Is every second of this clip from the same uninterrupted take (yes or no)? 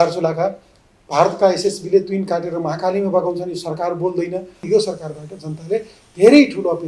no